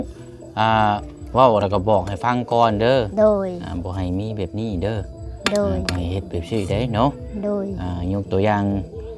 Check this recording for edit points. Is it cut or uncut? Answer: uncut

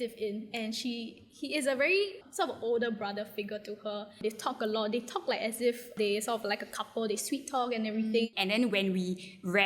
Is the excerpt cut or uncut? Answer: cut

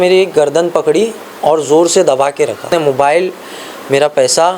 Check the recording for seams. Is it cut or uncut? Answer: cut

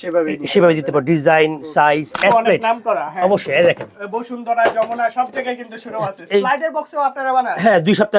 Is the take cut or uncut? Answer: cut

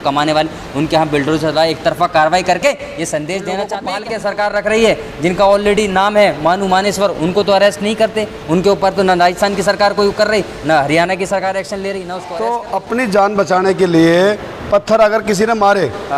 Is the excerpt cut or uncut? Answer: cut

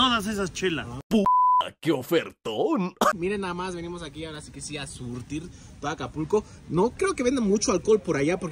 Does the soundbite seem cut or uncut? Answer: uncut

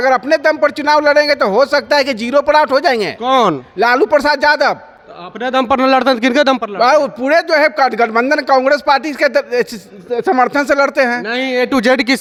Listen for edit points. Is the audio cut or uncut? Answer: uncut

